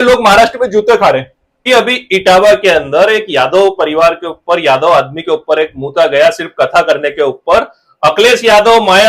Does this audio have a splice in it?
yes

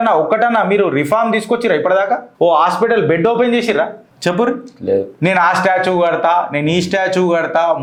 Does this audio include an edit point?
no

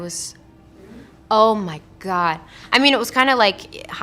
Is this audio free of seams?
no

